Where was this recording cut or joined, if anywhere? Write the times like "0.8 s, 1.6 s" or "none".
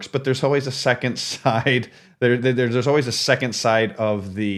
none